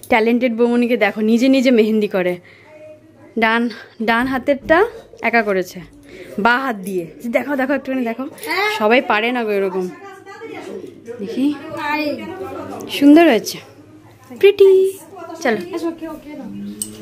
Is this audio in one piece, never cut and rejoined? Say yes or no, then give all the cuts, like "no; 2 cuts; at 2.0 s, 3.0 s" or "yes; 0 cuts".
yes; 0 cuts